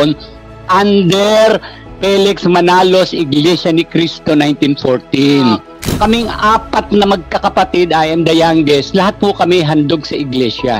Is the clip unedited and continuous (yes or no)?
no